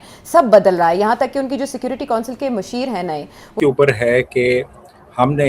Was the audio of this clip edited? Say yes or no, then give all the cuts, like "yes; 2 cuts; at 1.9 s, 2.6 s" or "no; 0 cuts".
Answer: yes; 1 cut; at 3.5 s